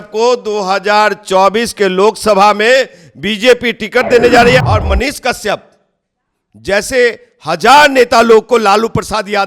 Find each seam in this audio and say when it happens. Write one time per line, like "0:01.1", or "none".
0:04.6